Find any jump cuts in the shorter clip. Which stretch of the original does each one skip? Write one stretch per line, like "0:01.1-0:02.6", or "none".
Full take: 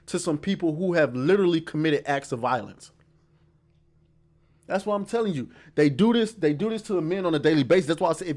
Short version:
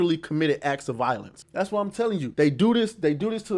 0:02.8-0:04.5
0:05.4-0:05.7